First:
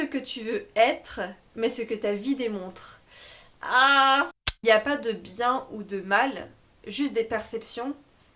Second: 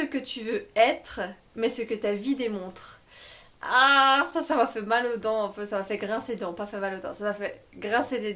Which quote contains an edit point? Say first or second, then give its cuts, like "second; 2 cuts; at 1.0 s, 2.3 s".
first; 1 cut; at 4.3 s